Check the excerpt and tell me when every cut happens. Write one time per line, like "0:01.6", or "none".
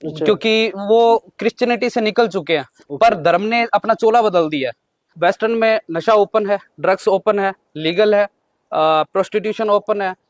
0:05.1